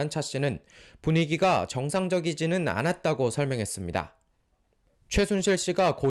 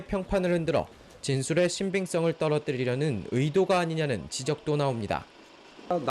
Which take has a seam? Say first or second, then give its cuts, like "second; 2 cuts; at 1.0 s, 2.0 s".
second; 1 cut; at 4.1 s